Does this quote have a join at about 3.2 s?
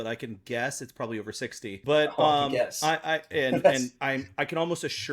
no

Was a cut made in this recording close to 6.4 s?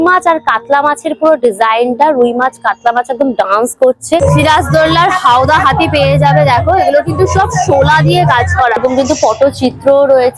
no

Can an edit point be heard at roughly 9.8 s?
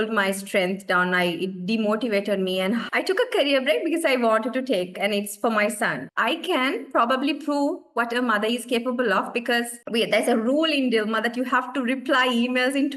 yes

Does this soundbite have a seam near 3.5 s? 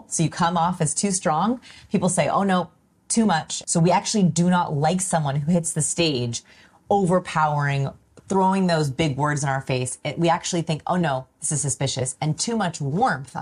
yes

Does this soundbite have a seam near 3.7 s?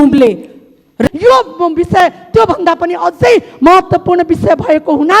no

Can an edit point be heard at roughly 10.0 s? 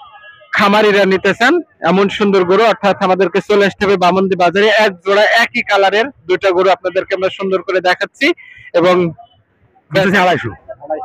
yes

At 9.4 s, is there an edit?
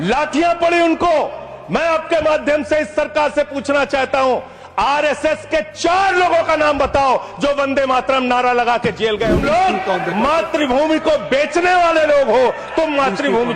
yes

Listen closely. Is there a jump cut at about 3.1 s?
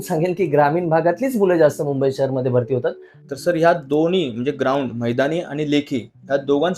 yes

